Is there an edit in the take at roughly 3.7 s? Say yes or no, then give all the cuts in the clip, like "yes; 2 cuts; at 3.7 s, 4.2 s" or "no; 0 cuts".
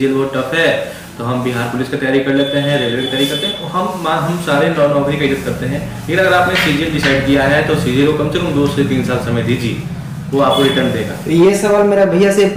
no; 0 cuts